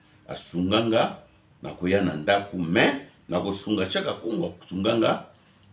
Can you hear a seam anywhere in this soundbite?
no; 0 cuts

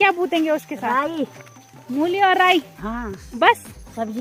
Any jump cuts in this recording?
no; 0 cuts

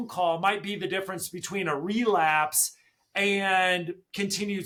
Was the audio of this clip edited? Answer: no; 0 cuts

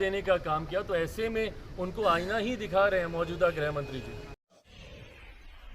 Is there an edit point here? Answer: yes; 1 cut; at 4.4 s

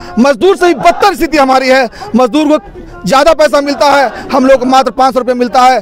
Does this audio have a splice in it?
no; 0 cuts

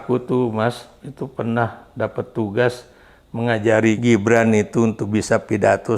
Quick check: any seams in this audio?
yes; 1 cut; at 4.0 s

